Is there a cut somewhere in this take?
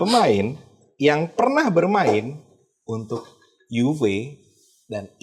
no; 0 cuts

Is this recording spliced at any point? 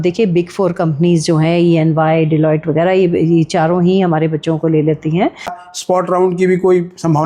yes; 1 cut; at 5.6 s

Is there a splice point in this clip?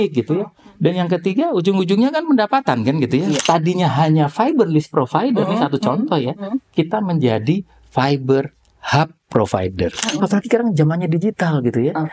yes; 2 cuts; at 3.4 s, 10.0 s

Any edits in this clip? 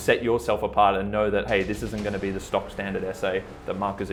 no; 0 cuts

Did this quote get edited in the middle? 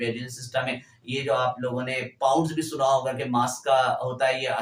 no; 0 cuts

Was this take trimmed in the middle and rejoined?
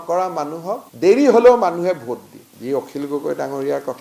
yes; 1 cut; at 2.5 s

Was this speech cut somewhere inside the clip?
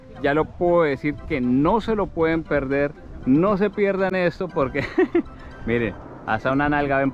no; 0 cuts

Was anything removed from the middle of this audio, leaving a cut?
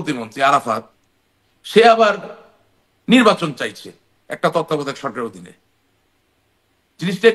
no; 0 cuts

